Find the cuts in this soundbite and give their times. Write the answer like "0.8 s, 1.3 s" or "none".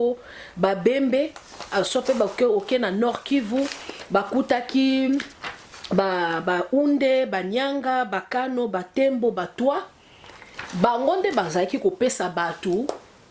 none